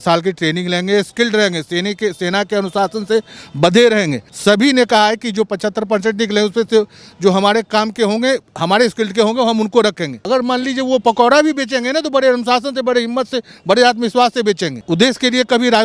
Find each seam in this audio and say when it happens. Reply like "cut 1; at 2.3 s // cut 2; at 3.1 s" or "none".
cut 1; at 4.2 s // cut 2; at 10.1 s // cut 3; at 14.7 s

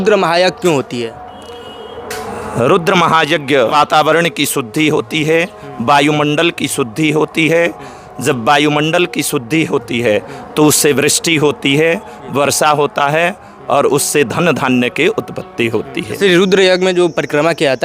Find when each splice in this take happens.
cut 1; at 3.7 s // cut 2; at 16.1 s

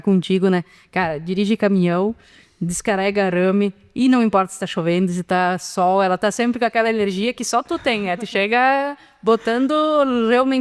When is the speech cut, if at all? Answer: none

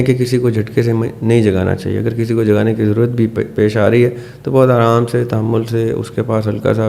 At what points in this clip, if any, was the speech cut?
none

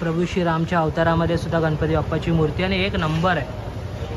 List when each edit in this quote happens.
none

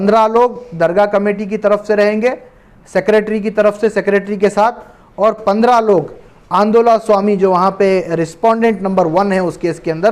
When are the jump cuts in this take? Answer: none

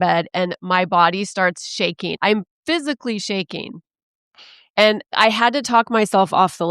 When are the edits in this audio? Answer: cut 1; at 2.2 s // cut 2; at 5.1 s

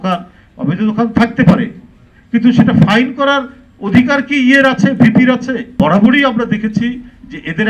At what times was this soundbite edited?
cut 1; at 5.7 s

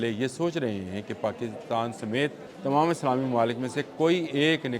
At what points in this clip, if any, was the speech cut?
cut 1; at 2.5 s

